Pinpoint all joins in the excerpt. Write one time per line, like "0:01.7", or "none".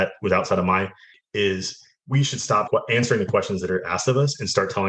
0:01.1
0:02.7